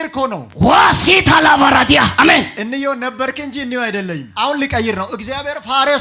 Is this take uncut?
yes; 0 cuts

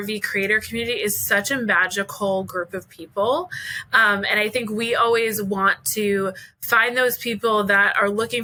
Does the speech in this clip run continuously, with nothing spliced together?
yes; 0 cuts

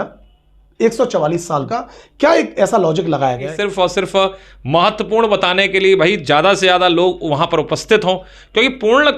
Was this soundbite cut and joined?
yes; 2 cuts; at 1.7 s, 3.5 s

